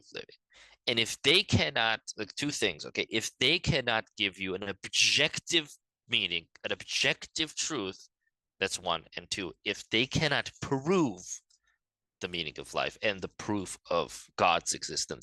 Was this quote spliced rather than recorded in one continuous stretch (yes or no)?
no